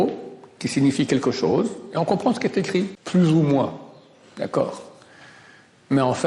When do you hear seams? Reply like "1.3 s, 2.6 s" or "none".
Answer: none